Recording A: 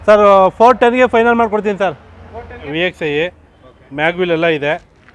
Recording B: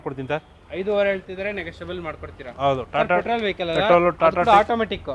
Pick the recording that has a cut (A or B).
A